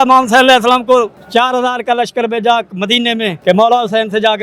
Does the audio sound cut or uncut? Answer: cut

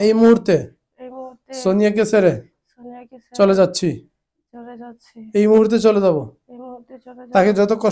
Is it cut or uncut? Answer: uncut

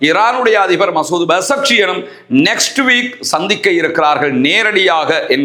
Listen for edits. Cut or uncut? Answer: uncut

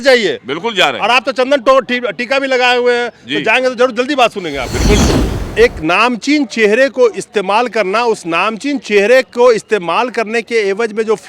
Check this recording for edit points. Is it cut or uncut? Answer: cut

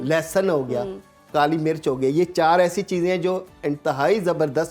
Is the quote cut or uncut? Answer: uncut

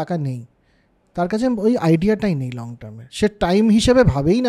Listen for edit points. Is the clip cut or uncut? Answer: uncut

